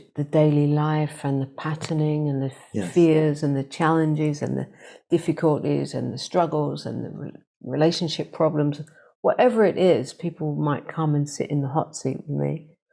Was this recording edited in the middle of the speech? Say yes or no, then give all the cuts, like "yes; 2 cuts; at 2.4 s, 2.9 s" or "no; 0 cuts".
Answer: no; 0 cuts